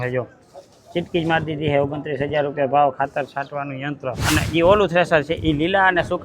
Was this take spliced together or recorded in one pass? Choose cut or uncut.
cut